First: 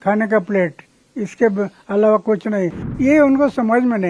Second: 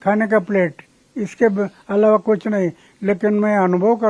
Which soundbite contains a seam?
first; 1 cut; at 2.8 s

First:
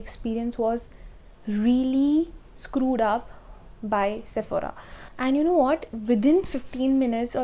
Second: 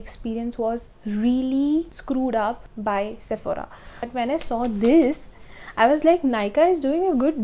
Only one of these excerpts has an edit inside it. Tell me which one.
second; 4 cuts; at 0.9 s, 2.0 s, 2.7 s, 4.0 s

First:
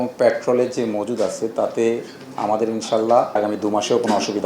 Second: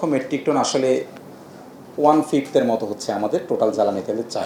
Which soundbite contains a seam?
first; 1 cut; at 3.4 s

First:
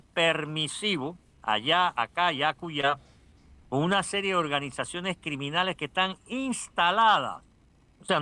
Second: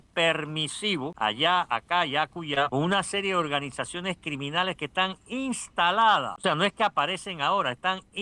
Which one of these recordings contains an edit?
second; 3 cuts; at 1.1 s, 2.7 s, 6.3 s

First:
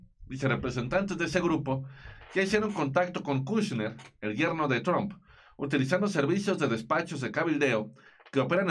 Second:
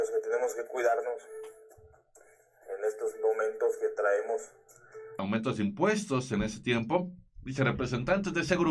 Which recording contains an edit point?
second; 1 cut; at 5.2 s

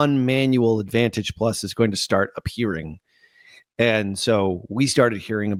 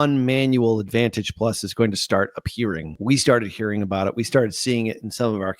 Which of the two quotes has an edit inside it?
second; 1 cut; at 3.0 s

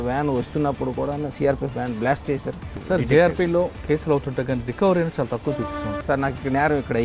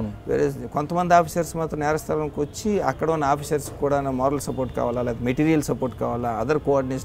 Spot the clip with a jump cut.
first; 3 cuts; at 2.7 s, 3.8 s, 6.0 s

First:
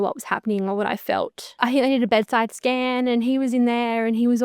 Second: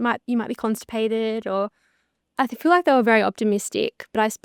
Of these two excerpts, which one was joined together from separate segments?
first; 1 cut; at 1.4 s

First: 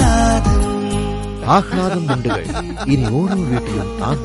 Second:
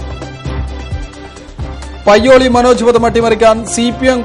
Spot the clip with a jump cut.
second; 1 cut; at 1.1 s

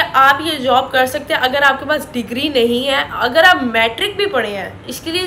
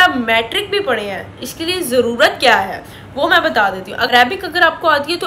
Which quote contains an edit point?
second; 1 cut; at 4.1 s

